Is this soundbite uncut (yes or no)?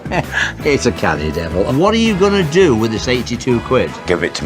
no